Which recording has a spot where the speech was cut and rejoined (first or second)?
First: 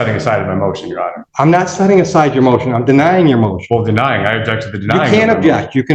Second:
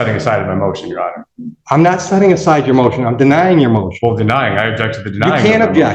first